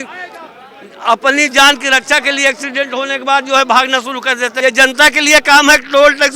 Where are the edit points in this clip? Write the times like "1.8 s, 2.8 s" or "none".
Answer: 4.5 s